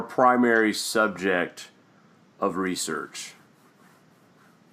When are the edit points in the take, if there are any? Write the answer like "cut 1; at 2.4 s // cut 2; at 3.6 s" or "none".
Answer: cut 1; at 2.6 s